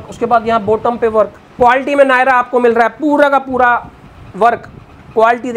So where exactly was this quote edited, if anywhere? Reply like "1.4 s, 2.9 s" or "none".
1.4 s